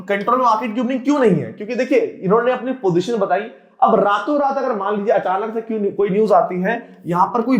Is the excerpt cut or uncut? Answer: uncut